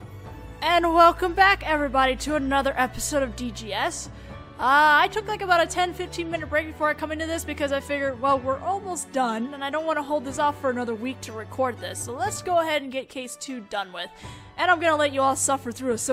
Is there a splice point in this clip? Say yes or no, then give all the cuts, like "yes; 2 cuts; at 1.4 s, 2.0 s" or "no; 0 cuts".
no; 0 cuts